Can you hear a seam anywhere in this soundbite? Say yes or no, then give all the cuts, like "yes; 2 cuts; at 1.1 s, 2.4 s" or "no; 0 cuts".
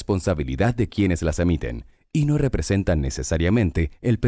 no; 0 cuts